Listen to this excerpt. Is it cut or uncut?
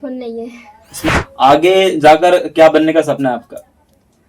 cut